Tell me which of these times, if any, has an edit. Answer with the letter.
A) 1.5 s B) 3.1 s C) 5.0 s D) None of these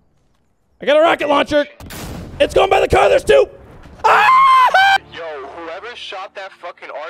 C